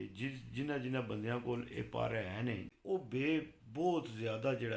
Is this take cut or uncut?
cut